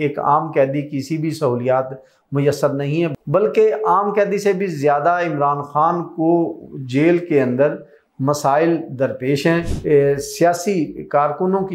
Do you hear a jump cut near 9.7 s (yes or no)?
yes